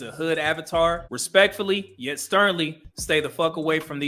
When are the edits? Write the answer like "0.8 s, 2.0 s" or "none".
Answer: 1.1 s